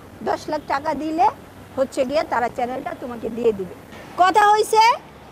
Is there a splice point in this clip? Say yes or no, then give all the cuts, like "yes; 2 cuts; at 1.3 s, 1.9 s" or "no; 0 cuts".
yes; 1 cut; at 3.8 s